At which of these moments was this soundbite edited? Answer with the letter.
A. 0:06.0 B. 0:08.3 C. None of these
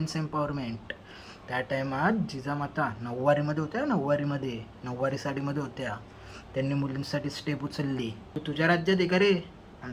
B